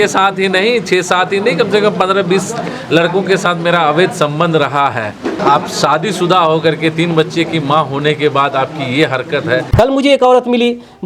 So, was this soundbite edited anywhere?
yes; 2 cuts; at 5.4 s, 9.7 s

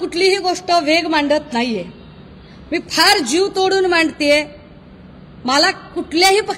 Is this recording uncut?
yes; 0 cuts

